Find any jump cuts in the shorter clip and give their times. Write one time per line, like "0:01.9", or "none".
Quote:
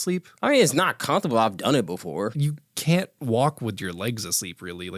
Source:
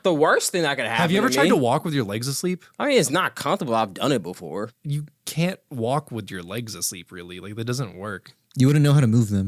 0:02.4